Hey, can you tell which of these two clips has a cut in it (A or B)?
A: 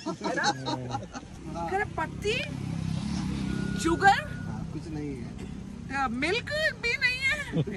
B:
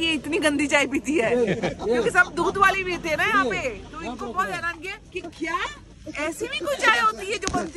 A